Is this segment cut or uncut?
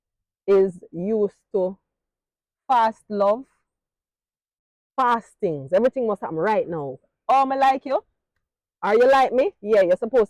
uncut